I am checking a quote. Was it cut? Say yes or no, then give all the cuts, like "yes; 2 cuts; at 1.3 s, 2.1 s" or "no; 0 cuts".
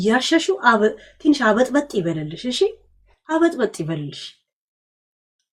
no; 0 cuts